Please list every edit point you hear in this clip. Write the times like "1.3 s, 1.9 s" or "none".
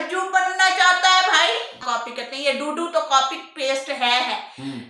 1.8 s